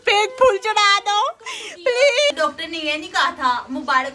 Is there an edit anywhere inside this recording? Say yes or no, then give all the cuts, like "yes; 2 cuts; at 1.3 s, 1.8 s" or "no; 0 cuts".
yes; 1 cut; at 2.3 s